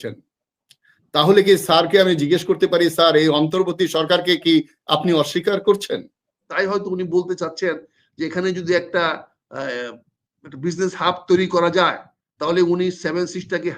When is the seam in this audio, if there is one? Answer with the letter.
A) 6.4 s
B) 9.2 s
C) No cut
A